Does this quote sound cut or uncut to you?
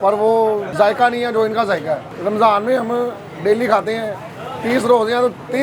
uncut